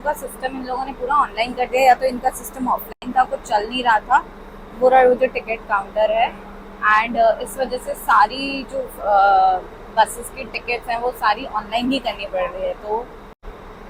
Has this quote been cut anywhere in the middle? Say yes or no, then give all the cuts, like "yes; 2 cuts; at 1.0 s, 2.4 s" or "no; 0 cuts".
no; 0 cuts